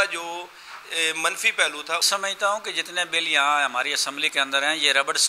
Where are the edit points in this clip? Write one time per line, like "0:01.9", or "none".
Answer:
0:02.1